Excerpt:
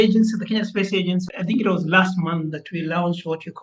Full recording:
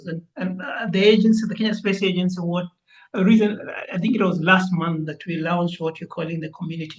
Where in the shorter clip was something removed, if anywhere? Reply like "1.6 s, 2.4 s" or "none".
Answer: 1.3 s